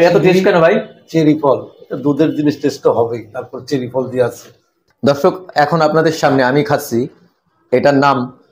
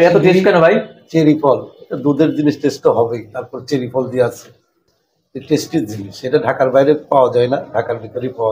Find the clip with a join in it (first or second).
first